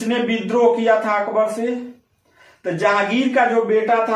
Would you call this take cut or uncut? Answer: uncut